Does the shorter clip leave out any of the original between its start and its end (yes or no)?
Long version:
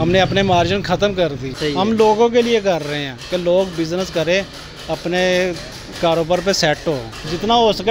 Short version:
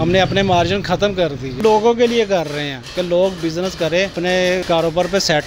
yes